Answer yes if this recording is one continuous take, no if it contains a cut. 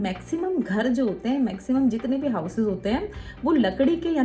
yes